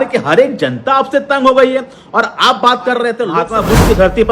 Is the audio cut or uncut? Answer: cut